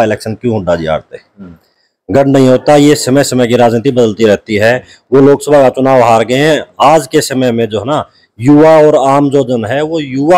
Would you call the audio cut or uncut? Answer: uncut